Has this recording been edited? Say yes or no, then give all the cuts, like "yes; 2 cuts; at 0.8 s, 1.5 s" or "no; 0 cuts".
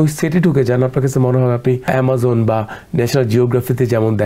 yes; 1 cut; at 1.9 s